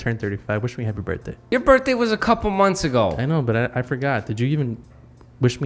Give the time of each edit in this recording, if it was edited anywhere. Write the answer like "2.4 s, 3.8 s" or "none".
1.3 s